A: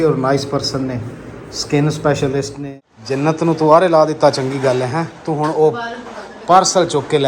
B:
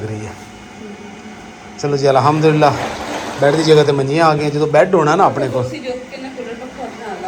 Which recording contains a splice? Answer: A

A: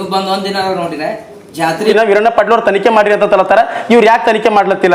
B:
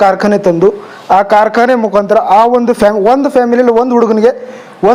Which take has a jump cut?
A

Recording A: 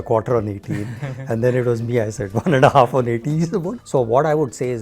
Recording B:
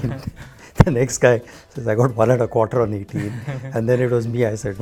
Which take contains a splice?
A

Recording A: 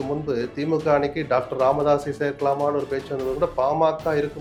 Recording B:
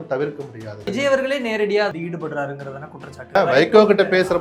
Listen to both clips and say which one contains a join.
B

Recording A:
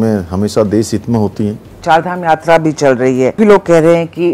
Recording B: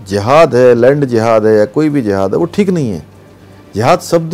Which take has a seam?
A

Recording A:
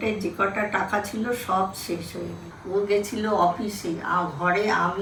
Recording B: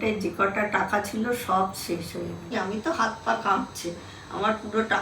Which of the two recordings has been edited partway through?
B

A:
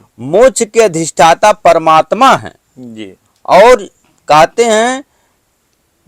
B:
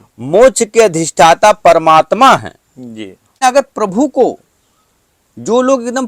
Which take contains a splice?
B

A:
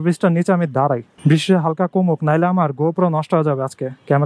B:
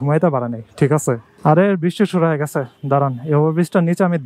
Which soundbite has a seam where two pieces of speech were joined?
B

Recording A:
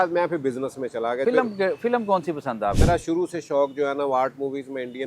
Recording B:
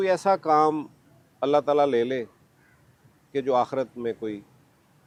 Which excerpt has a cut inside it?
A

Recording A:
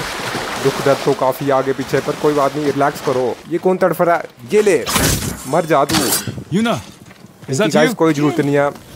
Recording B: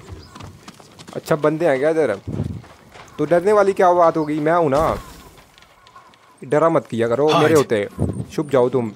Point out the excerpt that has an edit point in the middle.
A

